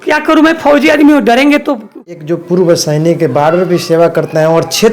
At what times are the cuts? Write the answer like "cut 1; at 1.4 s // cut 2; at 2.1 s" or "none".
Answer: cut 1; at 2.0 s